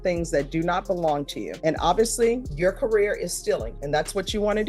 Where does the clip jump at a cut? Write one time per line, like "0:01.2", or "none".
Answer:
0:01.4
0:02.5
0:03.7